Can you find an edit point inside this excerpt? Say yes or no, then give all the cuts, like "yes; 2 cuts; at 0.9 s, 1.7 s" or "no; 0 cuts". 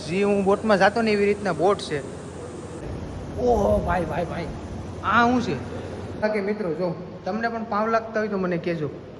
yes; 2 cuts; at 2.9 s, 6.2 s